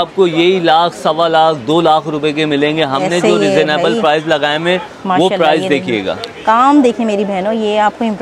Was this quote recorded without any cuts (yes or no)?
yes